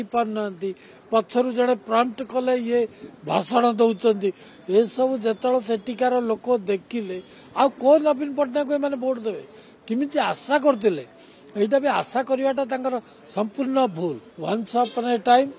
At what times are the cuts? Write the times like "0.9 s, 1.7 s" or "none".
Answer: 14.3 s